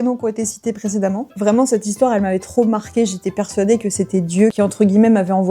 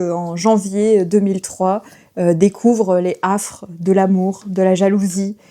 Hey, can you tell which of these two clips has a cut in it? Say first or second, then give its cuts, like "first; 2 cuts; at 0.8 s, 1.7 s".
first; 2 cuts; at 1.3 s, 4.5 s